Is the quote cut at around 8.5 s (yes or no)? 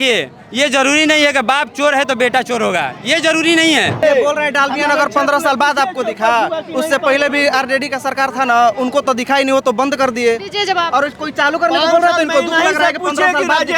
no